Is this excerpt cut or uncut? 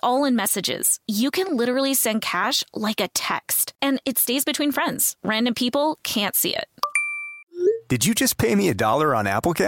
uncut